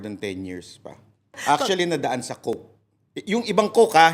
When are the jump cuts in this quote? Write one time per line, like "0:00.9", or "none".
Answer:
0:01.4